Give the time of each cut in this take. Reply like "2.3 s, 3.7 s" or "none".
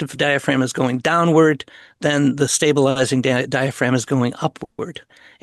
none